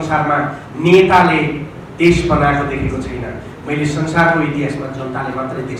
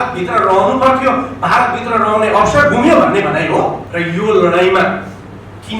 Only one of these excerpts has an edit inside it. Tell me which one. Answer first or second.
second